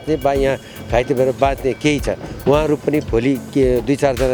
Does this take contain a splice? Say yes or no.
no